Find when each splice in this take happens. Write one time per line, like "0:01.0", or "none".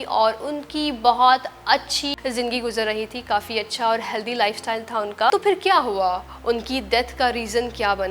0:02.2
0:05.3